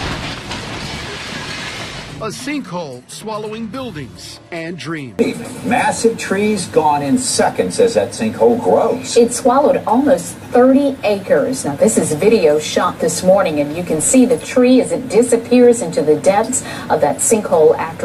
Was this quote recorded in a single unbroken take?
yes; 0 cuts

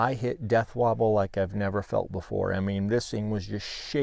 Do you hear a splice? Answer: no; 0 cuts

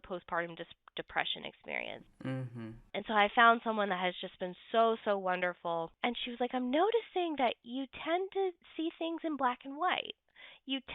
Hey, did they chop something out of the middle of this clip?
yes; 2 cuts; at 2.9 s, 5.9 s

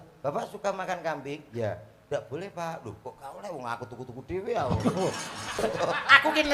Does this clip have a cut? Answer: yes; 1 cut; at 5.6 s

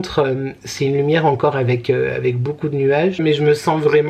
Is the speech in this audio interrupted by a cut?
yes; 1 cut; at 3.2 s

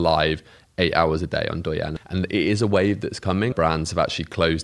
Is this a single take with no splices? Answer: no; 2 cuts; at 2.0 s, 3.5 s

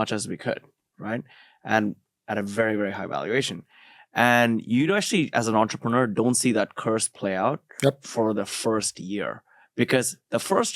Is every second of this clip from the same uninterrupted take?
yes; 0 cuts

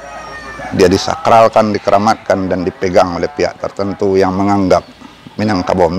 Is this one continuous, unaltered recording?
yes; 0 cuts

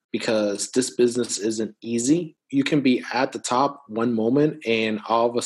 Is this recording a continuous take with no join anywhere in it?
no; 1 cut; at 2.3 s

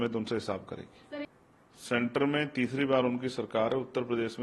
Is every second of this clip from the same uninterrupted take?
no; 1 cut; at 1.3 s

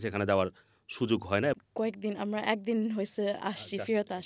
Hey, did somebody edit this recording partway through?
yes; 1 cut; at 1.6 s

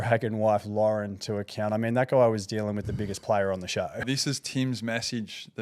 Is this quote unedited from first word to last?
no; 1 cut; at 4.1 s

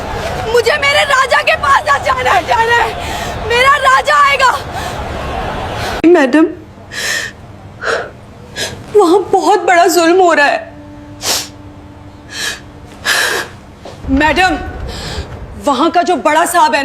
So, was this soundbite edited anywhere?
yes; 1 cut; at 6.0 s

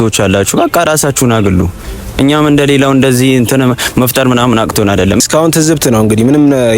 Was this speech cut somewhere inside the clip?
yes; 1 cut; at 5.2 s

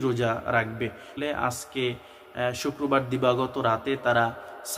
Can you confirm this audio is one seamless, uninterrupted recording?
no; 1 cut; at 1.2 s

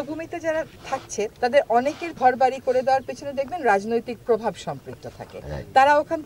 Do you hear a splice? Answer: yes; 2 cuts; at 1.1 s, 2.1 s

